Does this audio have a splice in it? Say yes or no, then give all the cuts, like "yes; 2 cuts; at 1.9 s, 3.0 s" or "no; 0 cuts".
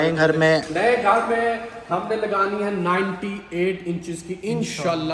no; 0 cuts